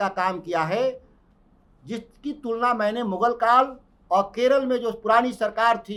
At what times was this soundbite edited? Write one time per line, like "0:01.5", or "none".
none

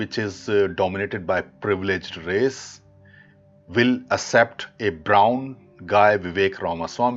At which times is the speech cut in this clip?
none

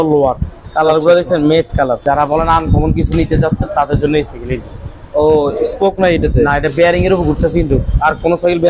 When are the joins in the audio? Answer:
0:02.0

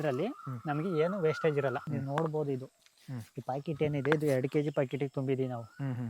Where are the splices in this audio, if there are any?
0:01.8

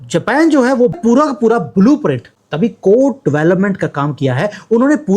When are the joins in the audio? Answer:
0:00.9

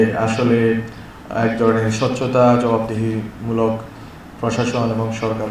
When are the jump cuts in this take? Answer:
none

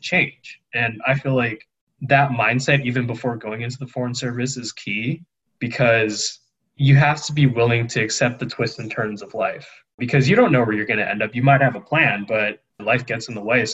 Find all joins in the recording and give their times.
0:09.8
0:12.8

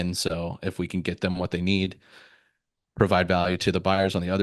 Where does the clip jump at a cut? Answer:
none

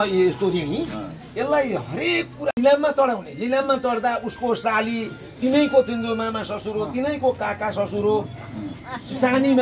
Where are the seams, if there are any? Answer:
0:02.5

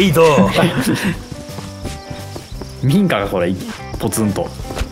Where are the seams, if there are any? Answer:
none

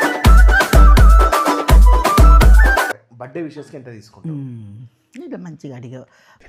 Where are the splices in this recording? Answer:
none

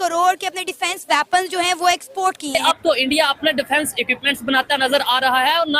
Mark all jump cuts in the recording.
0:02.6

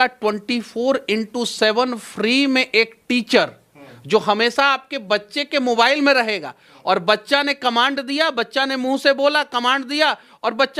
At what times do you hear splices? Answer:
none

